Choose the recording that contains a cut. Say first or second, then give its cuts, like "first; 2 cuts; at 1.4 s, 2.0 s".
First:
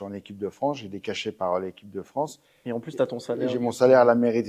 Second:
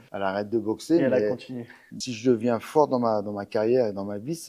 second; 1 cut; at 2.0 s